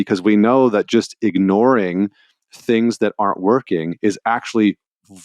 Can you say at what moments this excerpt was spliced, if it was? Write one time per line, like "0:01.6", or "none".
none